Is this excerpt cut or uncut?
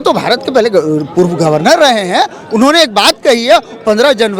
uncut